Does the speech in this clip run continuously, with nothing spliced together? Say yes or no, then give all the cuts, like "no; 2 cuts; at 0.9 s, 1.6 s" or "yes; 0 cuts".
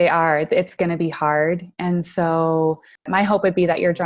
no; 1 cut; at 3.1 s